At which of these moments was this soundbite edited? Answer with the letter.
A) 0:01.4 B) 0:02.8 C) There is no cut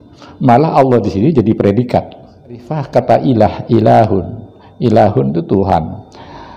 B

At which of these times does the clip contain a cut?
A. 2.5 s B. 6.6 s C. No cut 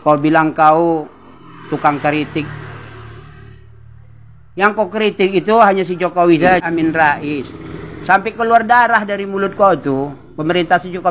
B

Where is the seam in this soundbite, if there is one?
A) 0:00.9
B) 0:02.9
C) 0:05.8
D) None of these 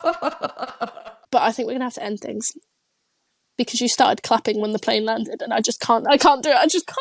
A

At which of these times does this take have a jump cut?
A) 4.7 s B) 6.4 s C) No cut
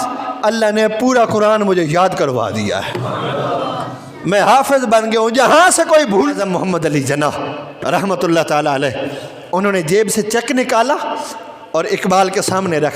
B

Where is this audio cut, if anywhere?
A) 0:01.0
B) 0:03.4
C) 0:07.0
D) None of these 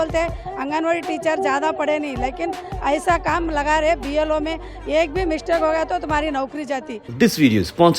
C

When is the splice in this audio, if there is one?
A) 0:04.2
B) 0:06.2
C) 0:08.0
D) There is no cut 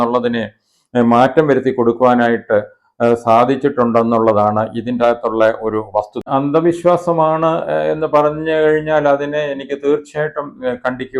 B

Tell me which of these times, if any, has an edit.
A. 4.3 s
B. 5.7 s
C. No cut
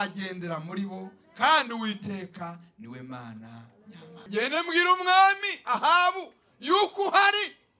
A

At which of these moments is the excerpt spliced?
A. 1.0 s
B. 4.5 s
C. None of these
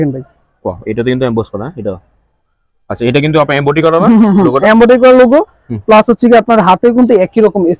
C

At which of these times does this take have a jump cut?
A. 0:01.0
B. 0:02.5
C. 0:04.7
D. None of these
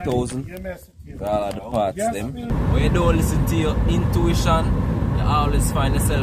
B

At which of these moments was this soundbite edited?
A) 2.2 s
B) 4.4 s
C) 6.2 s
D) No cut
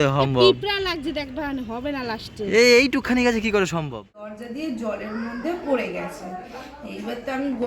B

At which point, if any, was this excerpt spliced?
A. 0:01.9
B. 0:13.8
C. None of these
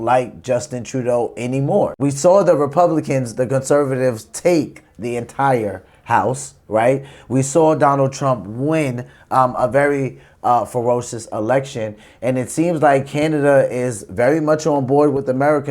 A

